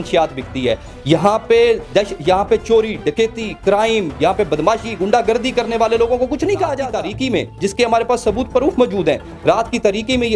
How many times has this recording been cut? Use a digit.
1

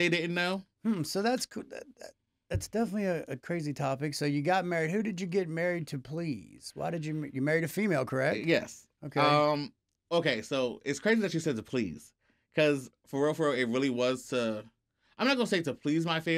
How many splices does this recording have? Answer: 1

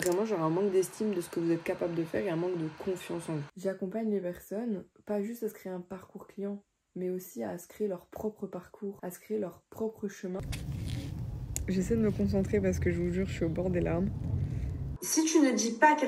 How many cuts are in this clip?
3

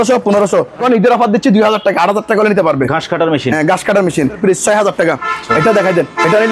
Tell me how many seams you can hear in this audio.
2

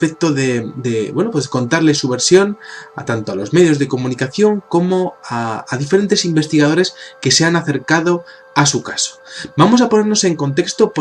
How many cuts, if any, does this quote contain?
1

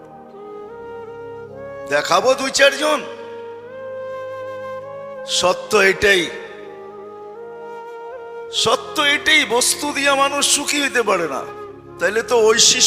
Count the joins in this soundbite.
0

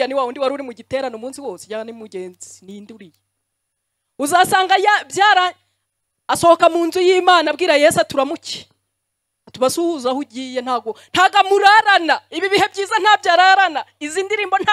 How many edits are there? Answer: 0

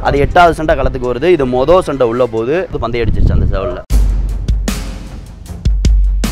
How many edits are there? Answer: 2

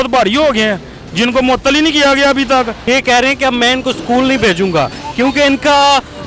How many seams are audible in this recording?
1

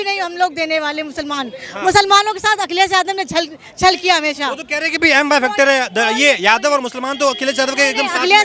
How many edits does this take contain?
0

